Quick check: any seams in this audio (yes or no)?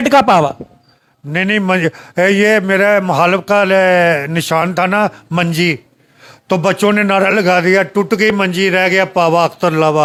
no